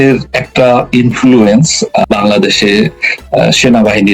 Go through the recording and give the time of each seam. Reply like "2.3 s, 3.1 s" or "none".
2.0 s